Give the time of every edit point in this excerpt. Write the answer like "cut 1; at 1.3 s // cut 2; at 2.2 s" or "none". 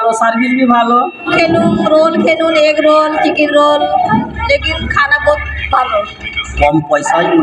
cut 1; at 1.3 s // cut 2; at 6.5 s